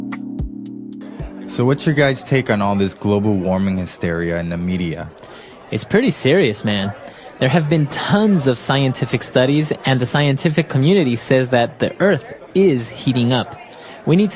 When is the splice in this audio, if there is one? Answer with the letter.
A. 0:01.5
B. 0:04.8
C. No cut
A